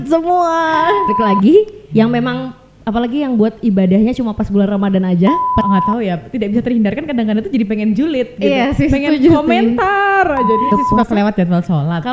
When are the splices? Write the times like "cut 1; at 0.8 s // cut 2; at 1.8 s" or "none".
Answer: cut 1; at 1.1 s // cut 2; at 5.6 s // cut 3; at 10.7 s